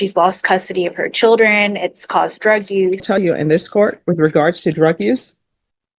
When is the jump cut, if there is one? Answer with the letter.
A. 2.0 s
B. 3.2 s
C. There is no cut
B